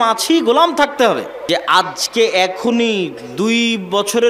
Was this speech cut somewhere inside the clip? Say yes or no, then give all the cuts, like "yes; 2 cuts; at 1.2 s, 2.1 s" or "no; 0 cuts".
yes; 1 cut; at 1.3 s